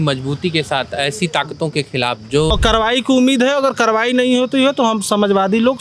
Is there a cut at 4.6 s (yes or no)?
no